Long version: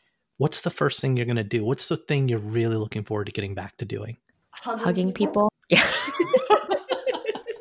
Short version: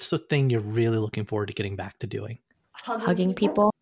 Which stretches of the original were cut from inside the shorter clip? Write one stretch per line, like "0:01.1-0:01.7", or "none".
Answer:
none